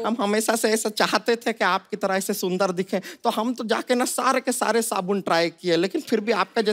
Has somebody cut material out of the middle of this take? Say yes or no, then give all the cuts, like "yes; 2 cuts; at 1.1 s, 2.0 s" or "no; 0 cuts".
no; 0 cuts